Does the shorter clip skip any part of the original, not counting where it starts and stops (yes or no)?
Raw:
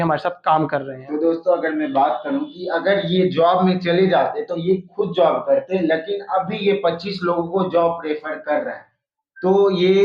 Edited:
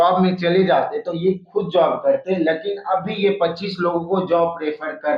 no